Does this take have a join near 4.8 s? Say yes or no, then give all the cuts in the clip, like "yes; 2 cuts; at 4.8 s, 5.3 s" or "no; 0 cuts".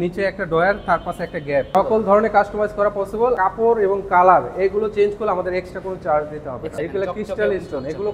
no; 3 cuts; at 1.7 s, 3.4 s, 6.7 s